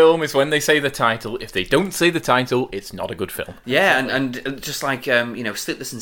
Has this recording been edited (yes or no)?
yes